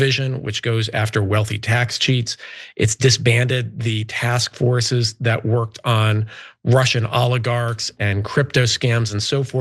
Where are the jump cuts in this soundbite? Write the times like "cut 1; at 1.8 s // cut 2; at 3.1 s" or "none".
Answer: none